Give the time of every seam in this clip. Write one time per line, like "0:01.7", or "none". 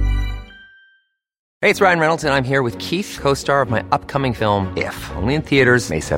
0:01.4